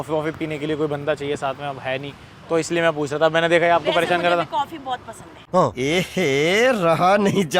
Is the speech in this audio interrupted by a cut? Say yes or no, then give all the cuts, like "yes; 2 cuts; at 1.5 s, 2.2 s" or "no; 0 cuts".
no; 0 cuts